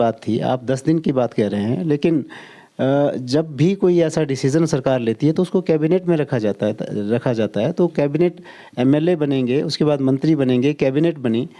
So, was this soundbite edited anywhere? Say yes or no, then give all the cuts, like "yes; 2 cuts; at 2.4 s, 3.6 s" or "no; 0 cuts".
no; 0 cuts